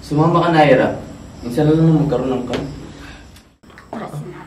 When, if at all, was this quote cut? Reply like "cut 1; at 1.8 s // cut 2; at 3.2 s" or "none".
cut 1; at 3.5 s